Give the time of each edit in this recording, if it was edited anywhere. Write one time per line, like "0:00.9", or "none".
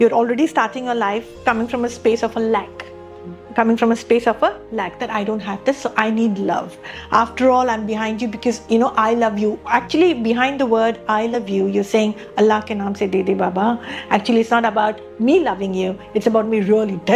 none